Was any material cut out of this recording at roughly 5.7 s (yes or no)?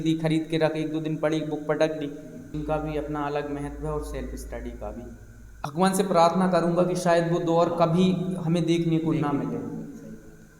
yes